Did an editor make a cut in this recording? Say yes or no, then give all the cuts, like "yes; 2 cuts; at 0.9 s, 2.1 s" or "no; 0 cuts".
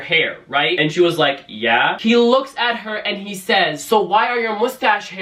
yes; 1 cut; at 1.9 s